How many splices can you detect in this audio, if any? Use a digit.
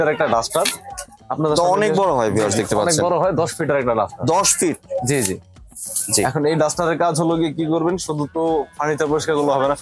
0